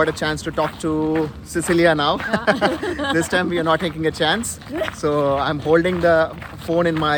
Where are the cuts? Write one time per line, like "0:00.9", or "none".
none